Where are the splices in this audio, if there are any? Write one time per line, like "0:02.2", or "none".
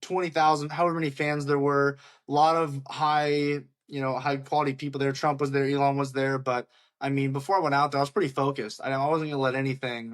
none